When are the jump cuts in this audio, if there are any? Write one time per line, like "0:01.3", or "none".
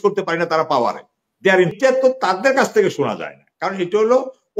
0:01.7